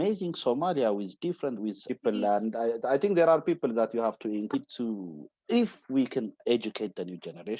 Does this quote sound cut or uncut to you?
cut